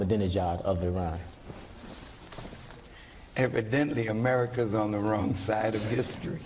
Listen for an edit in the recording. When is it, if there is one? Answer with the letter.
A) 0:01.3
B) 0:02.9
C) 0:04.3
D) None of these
D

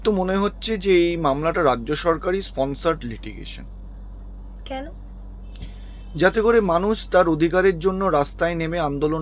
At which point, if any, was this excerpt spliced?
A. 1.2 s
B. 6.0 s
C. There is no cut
C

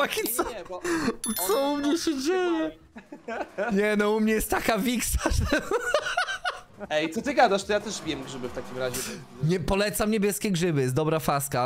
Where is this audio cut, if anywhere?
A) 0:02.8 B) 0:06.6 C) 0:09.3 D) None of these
D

